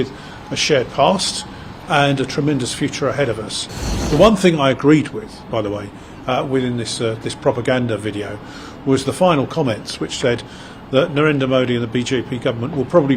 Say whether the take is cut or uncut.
cut